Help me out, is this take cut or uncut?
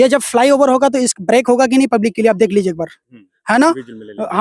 uncut